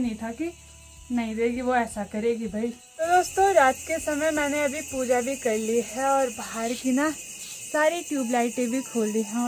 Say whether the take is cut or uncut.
uncut